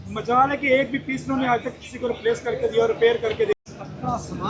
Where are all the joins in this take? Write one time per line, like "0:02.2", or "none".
0:03.6